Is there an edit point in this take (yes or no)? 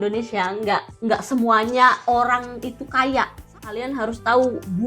yes